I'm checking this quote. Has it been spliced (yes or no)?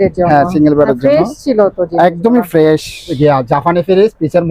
yes